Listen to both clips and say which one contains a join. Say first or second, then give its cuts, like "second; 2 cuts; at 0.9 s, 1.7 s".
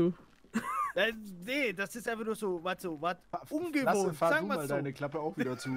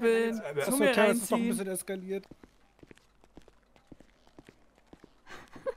second; 1 cut; at 2.2 s